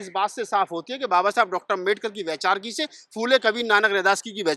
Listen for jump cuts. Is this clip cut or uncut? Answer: uncut